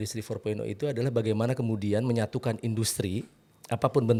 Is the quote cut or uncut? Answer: uncut